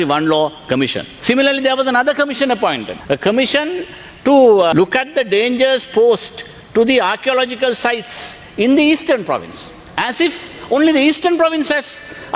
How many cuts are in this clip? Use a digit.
3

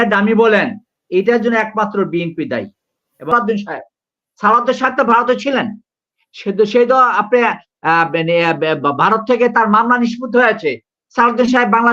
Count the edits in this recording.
1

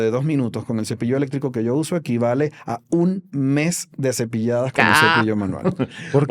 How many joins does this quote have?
0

